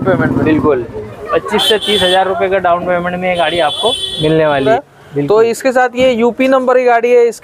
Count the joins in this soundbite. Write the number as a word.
two